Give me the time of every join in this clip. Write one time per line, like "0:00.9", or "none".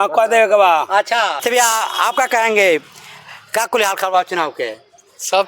0:01.4